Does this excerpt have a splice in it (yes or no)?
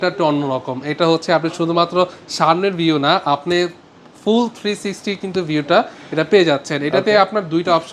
no